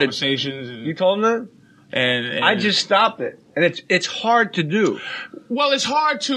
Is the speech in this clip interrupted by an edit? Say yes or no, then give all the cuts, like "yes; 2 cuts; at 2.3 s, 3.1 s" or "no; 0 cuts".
yes; 1 cut; at 4.8 s